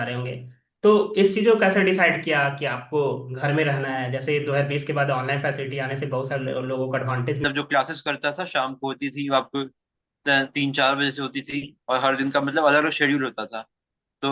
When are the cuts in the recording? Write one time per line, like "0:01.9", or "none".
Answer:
0:07.4

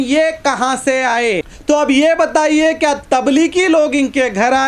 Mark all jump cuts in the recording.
0:01.5

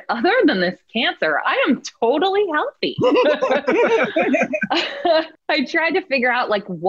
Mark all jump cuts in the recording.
0:05.4

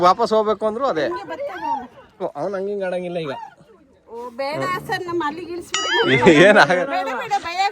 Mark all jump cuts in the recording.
none

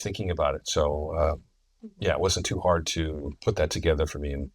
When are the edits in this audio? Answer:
0:03.3

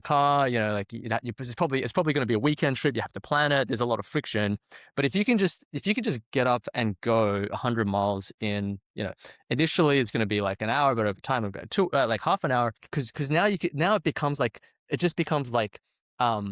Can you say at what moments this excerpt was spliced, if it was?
0:12.9

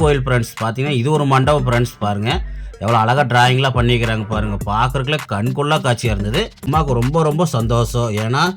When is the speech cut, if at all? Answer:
0:06.7

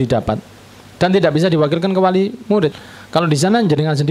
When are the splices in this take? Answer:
0:02.8

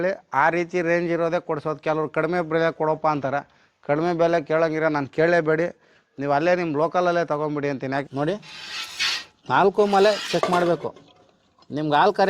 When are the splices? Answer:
0:08.0

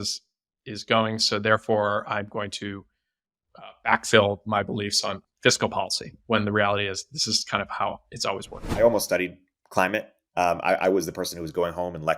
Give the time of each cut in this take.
0:05.2
0:08.7

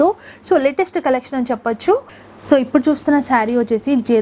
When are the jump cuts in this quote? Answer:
0:02.2

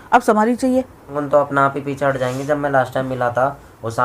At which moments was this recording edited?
0:01.1

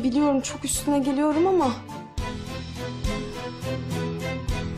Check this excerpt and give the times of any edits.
none

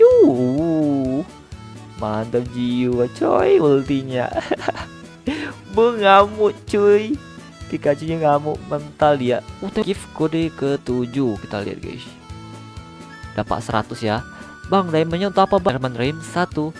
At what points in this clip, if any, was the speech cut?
0:09.8
0:12.0
0:13.3
0:15.7

